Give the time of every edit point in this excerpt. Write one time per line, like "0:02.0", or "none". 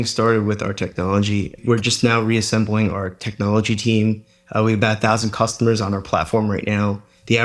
0:01.6